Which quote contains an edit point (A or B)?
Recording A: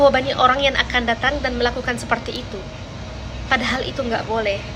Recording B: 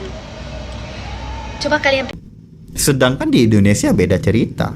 B